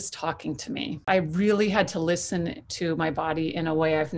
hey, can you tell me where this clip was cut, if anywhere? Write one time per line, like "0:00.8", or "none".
0:01.1